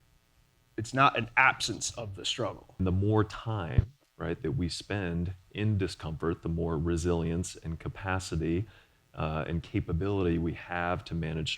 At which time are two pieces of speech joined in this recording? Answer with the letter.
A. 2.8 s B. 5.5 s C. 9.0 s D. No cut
A